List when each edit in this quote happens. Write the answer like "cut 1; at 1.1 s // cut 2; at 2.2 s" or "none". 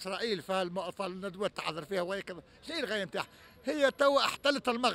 none